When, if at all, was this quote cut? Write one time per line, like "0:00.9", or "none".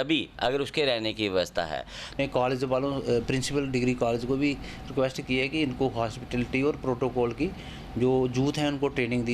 0:02.2

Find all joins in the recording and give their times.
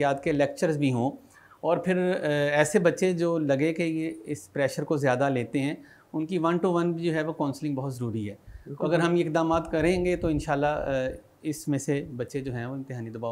none

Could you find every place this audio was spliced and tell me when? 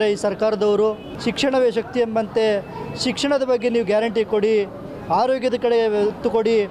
0:01.1

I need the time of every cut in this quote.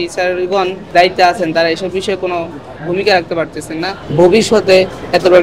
0:00.8
0:04.0

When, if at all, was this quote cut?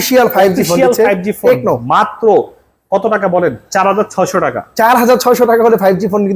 none

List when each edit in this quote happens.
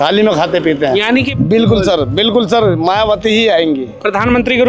0:01.3

